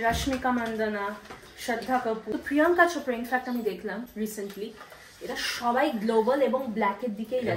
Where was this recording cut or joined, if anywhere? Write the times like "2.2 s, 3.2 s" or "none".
2.3 s